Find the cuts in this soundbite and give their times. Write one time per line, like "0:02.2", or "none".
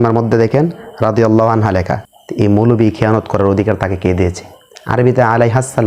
0:02.0